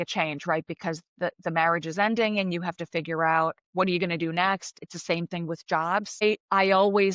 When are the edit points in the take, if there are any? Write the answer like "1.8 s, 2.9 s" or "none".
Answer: 3.6 s, 4.8 s, 6.2 s